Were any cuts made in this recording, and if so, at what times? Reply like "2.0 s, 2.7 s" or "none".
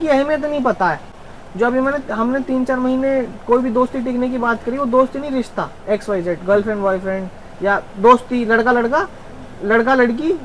none